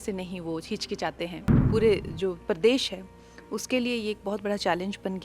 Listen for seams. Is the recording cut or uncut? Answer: cut